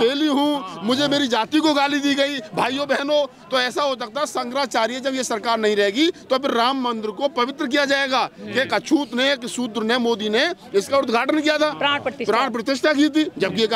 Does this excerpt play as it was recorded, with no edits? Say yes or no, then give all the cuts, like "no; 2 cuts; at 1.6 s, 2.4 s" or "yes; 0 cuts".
yes; 0 cuts